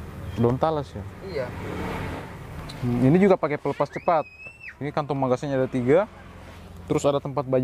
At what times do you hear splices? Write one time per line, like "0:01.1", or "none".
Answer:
0:02.3